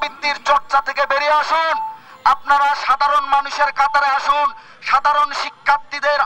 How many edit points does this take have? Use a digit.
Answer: 0